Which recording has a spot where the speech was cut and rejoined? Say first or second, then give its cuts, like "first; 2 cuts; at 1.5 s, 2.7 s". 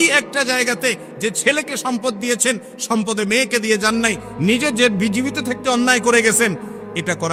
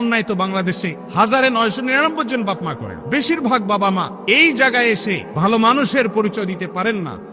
second; 4 cuts; at 0.9 s, 2.9 s, 4.1 s, 5.3 s